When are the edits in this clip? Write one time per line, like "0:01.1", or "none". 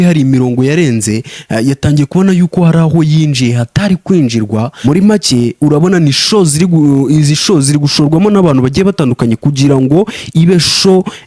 0:04.7